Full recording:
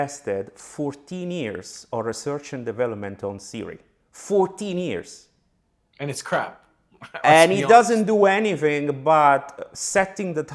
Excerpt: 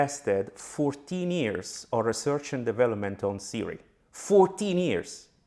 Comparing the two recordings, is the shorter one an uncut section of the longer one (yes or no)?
yes